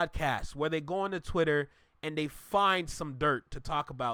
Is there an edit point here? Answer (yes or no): no